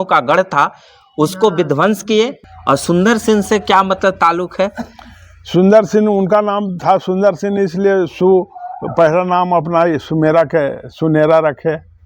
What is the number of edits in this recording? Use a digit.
1